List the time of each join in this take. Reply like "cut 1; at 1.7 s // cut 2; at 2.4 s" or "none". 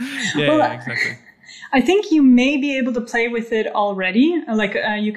none